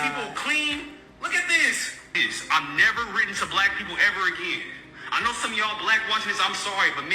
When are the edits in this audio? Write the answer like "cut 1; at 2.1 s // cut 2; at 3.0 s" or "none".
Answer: cut 1; at 2.3 s